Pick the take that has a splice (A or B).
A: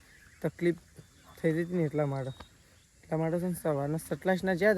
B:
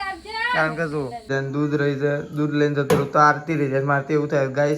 B